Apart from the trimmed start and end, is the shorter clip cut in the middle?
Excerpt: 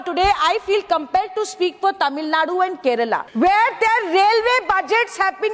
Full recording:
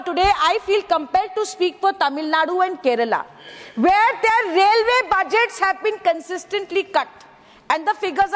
yes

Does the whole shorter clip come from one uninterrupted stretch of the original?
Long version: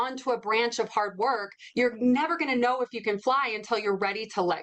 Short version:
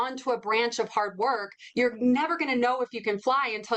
yes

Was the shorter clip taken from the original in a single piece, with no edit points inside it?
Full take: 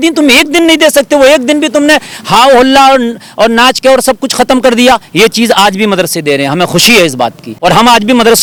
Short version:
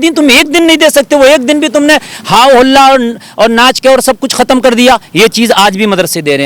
yes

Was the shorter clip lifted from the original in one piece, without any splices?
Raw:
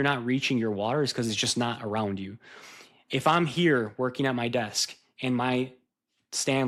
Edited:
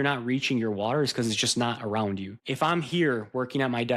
no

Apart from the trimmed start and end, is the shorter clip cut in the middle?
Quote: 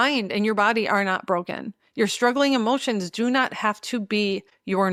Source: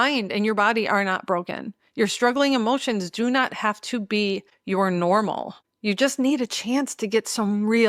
no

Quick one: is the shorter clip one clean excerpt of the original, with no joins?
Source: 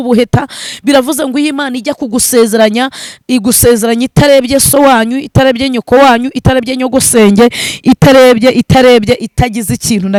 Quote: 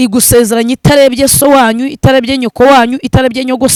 yes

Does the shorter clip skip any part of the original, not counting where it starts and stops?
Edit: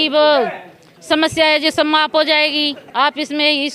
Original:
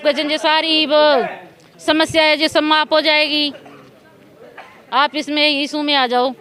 yes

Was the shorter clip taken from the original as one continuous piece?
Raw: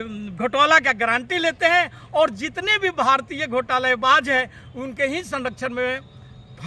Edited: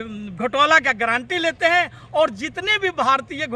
yes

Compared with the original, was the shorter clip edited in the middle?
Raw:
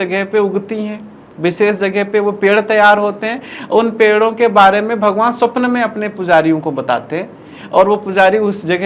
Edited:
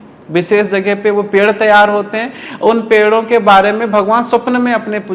no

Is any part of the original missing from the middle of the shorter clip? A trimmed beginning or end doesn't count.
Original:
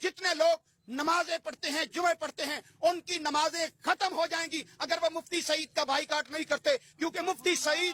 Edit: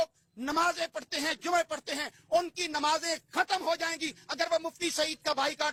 no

